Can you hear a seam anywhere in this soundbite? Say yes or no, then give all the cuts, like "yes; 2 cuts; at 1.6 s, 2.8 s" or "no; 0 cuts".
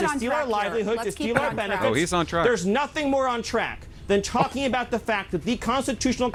no; 0 cuts